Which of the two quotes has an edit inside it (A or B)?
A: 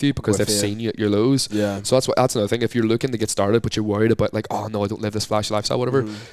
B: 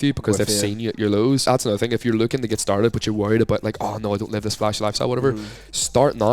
B